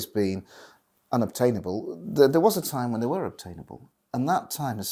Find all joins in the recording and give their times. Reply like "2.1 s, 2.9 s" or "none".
none